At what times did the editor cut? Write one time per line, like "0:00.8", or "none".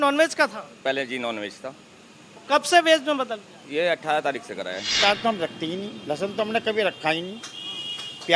0:04.9